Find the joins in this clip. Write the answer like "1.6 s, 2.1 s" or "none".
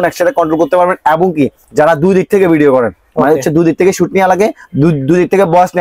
none